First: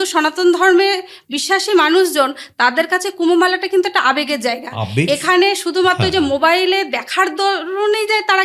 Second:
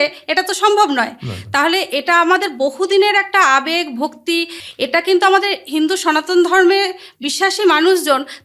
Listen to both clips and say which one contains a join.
second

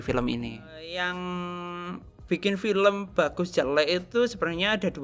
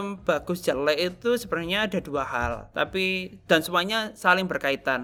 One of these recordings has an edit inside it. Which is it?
first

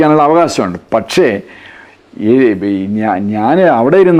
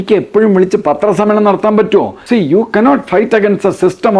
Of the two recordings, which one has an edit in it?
second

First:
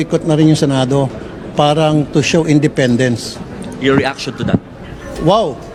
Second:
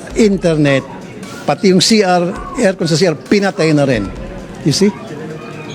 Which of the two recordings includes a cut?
second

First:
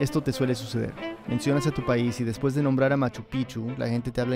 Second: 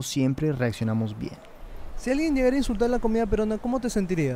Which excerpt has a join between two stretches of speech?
first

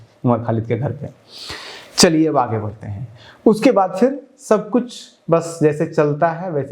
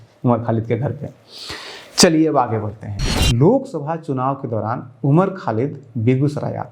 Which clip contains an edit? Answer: second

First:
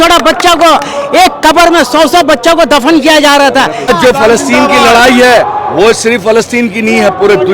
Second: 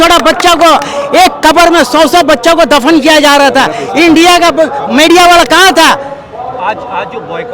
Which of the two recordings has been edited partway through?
first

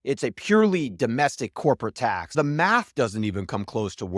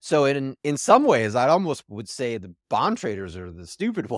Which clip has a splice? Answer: first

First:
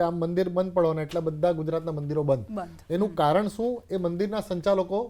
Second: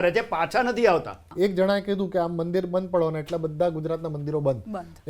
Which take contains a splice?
second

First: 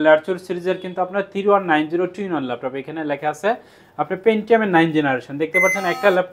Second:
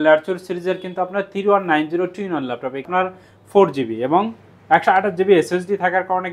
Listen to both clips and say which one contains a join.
second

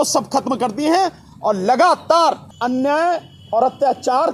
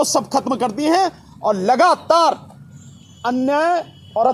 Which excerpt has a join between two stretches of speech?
first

